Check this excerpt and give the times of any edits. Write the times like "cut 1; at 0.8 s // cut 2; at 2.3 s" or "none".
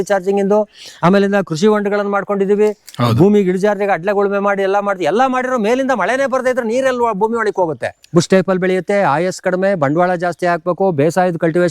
cut 1; at 8.0 s